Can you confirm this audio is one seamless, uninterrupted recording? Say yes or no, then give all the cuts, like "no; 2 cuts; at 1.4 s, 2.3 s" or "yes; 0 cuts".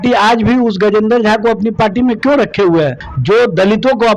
no; 1 cut; at 3.1 s